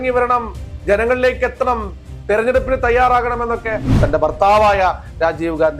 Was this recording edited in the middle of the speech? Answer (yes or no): yes